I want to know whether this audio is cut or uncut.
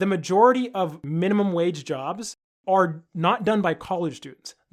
cut